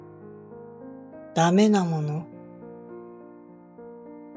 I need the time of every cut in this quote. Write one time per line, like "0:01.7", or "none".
0:02.2